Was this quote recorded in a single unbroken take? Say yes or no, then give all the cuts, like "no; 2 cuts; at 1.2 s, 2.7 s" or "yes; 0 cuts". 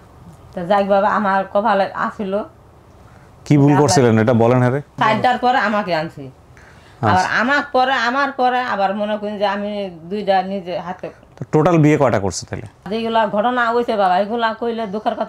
no; 2 cuts; at 4.9 s, 12.9 s